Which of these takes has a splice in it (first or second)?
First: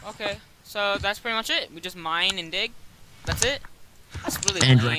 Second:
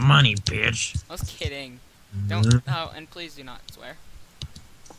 first